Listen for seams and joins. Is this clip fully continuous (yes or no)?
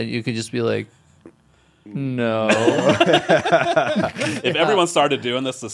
no